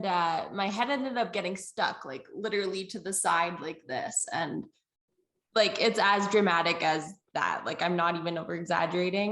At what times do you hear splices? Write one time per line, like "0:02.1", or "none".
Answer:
none